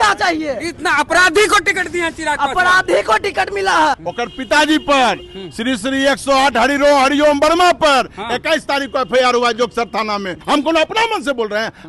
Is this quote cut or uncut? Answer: cut